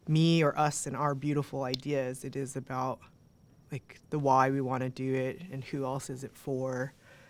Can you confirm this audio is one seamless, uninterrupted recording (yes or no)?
yes